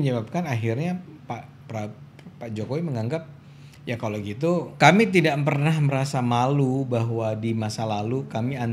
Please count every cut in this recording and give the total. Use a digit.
1